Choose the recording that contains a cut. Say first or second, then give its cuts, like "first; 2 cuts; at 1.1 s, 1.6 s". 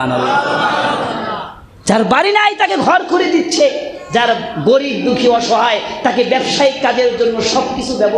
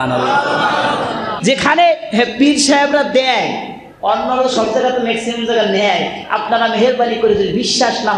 second; 1 cut; at 1.3 s